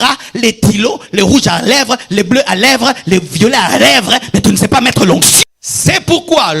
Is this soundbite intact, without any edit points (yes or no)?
no